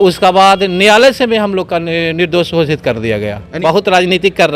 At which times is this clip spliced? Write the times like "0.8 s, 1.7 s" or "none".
3.5 s